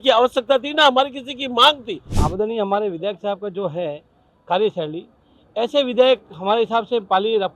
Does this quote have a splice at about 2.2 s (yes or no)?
yes